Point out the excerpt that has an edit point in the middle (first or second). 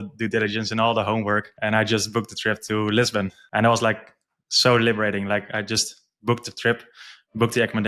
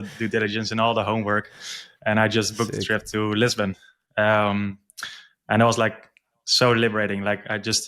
first